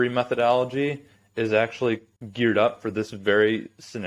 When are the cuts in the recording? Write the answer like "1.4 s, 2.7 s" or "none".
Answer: 2.2 s